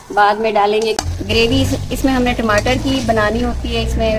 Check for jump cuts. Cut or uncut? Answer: cut